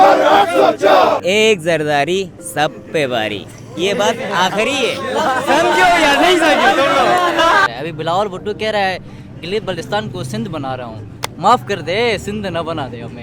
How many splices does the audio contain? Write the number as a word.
two